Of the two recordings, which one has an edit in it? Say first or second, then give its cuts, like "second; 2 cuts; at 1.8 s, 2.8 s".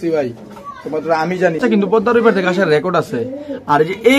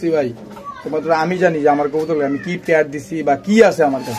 first; 1 cut; at 1.6 s